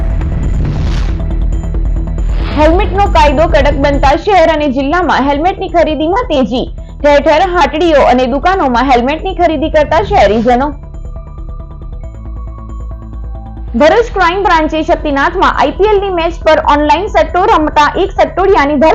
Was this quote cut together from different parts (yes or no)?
no